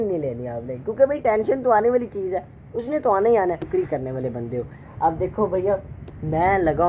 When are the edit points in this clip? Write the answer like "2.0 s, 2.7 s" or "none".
3.6 s